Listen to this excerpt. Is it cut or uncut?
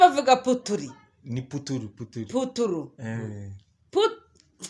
uncut